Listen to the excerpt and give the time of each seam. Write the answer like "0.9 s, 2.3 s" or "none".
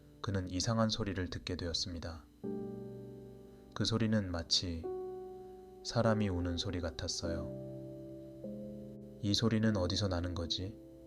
2.3 s, 3.6 s